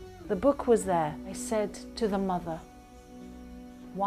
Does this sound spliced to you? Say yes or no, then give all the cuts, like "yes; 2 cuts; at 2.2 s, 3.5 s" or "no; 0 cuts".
yes; 1 cut; at 1.3 s